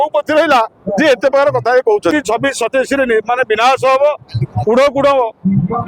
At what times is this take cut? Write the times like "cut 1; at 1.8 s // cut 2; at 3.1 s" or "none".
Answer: cut 1; at 2.1 s